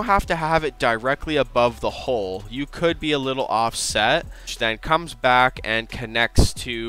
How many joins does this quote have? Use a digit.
1